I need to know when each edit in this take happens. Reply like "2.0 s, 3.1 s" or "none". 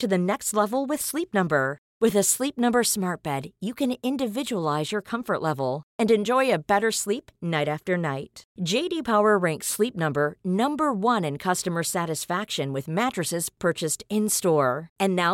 none